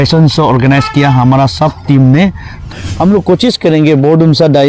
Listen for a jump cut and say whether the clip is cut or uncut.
cut